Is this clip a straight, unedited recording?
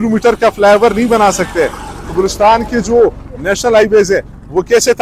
yes; 0 cuts

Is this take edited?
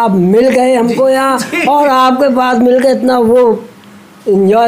no; 0 cuts

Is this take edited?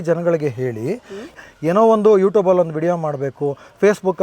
yes; 1 cut; at 1.3 s

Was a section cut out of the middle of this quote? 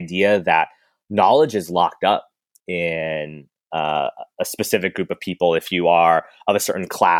no; 0 cuts

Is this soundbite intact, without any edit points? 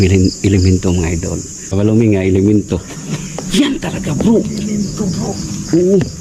no; 1 cut; at 1.7 s

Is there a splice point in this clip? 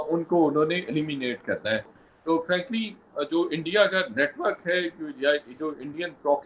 no; 0 cuts

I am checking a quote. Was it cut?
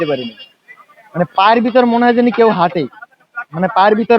no; 0 cuts

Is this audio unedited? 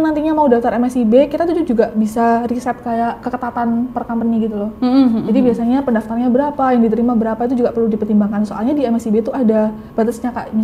yes; 0 cuts

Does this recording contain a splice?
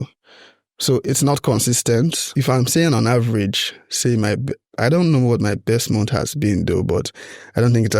yes; 1 cut; at 2.3 s

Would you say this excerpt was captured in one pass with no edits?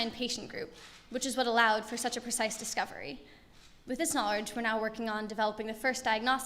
no; 1 cut; at 1.2 s

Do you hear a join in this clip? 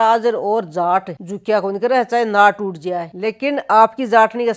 no; 0 cuts

